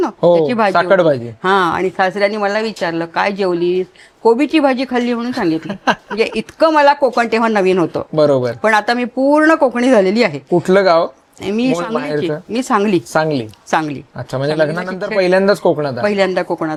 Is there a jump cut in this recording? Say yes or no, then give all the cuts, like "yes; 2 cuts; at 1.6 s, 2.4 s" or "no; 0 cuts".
no; 0 cuts